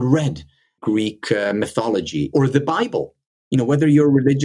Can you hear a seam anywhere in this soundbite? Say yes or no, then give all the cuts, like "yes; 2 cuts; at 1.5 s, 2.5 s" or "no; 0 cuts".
yes; 2 cuts; at 0.8 s, 2.3 s